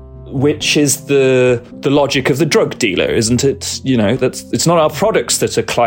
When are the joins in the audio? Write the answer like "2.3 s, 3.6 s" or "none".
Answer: 1.7 s

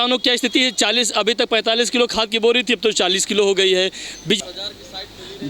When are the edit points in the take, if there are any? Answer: 4.4 s

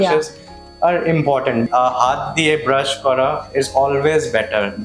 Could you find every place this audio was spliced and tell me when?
1.7 s

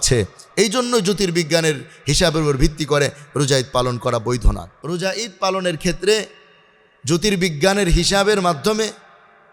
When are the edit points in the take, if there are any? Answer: 4.7 s

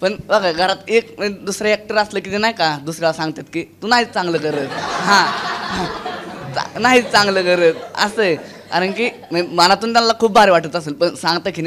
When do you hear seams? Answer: none

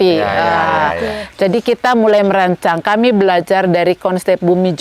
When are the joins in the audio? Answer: none

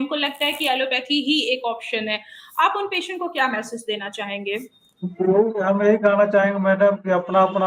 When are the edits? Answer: none

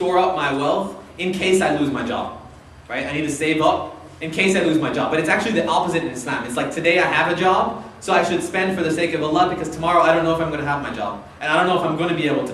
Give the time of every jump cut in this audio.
6.3 s

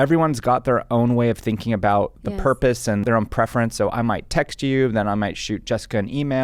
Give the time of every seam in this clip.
3.0 s

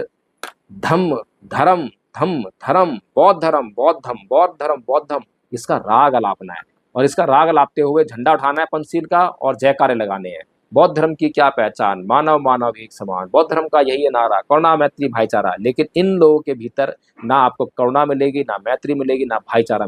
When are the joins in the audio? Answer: none

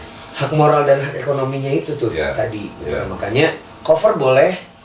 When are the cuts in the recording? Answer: 3.7 s

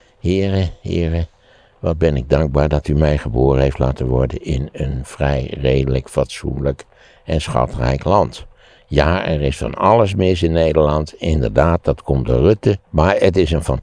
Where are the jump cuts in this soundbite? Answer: 12.9 s

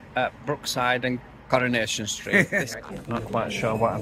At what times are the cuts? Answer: 2.7 s

